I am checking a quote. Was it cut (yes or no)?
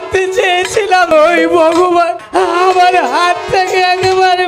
yes